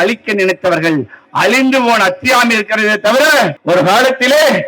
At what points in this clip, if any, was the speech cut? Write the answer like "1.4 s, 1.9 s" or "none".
3.6 s

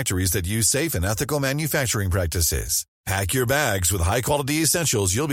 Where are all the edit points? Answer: none

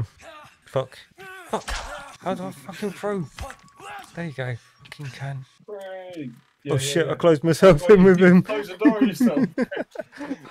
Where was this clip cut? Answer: none

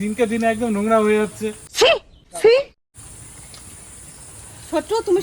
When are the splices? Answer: none

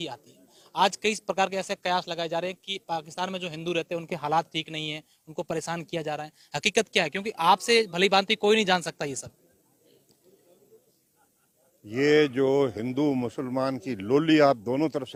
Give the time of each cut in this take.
none

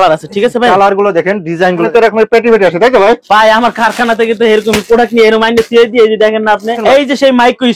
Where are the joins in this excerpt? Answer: 1.8 s, 6.8 s

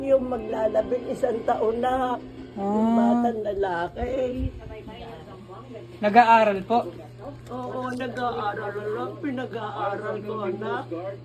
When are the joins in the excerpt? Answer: none

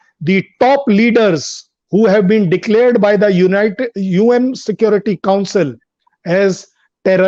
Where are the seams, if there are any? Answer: none

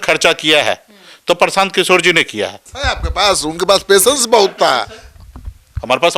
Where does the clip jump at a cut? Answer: 2.7 s

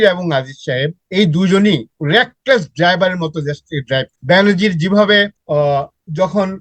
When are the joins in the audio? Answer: 1.0 s, 1.9 s, 4.1 s, 5.4 s

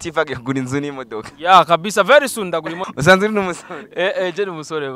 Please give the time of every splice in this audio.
2.8 s

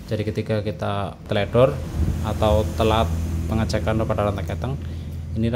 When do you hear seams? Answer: 1.2 s

